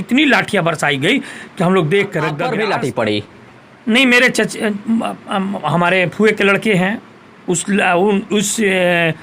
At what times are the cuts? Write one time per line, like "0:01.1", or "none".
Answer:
0:02.4